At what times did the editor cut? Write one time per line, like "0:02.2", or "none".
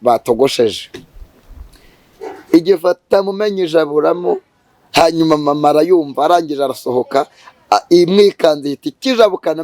none